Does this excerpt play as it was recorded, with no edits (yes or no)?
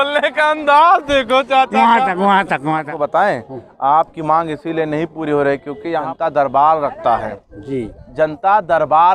no